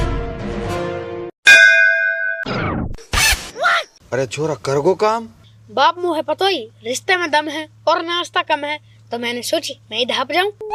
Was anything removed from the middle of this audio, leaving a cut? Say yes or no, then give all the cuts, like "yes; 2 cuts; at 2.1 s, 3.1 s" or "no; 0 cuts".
no; 0 cuts